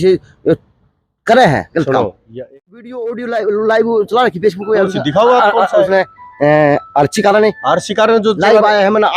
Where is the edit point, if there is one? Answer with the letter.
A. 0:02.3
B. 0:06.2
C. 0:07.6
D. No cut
A